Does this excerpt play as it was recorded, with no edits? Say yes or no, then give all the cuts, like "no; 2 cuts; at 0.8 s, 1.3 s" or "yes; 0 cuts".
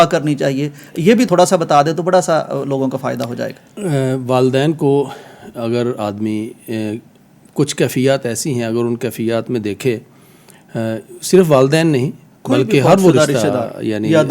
yes; 0 cuts